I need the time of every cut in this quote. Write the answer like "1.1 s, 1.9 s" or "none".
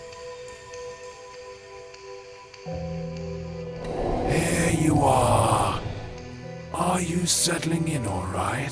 none

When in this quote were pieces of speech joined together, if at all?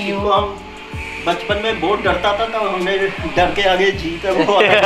none

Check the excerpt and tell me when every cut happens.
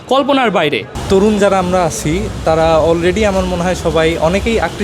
none

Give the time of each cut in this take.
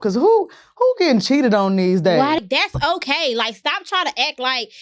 2.4 s

